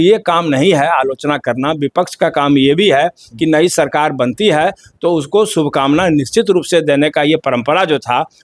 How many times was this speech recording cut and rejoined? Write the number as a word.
zero